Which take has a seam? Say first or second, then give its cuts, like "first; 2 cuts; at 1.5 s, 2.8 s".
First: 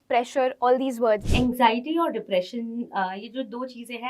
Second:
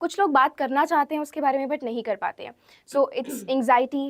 first; 1 cut; at 1.2 s